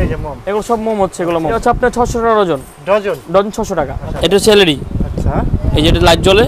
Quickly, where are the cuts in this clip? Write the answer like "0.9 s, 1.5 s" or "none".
1.6 s, 4.0 s